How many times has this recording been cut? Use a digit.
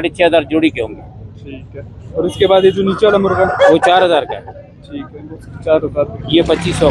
0